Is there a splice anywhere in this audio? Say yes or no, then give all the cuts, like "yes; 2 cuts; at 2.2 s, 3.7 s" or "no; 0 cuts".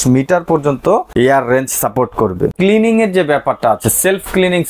yes; 2 cuts; at 1.1 s, 2.5 s